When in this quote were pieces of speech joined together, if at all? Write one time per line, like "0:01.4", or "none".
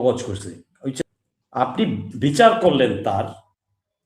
0:01.0

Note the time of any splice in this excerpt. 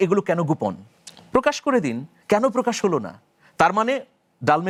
none

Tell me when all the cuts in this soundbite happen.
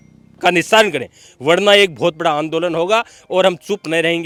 none

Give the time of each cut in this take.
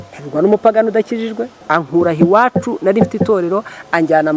0:01.5

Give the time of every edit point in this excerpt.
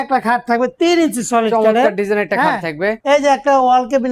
0:03.0

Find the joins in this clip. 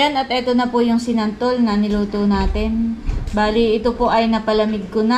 none

